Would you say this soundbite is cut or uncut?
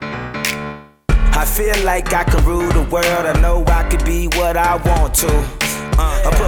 uncut